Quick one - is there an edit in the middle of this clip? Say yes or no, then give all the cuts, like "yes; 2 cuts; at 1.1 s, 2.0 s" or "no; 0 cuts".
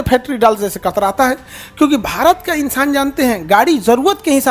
no; 0 cuts